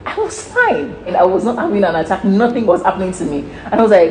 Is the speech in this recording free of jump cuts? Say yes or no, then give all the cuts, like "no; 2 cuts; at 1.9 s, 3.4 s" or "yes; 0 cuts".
no; 2 cuts; at 1.1 s, 2.6 s